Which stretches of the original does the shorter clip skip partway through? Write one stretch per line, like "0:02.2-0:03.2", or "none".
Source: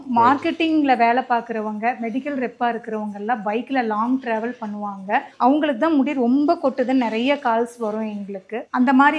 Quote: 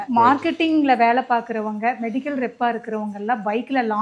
none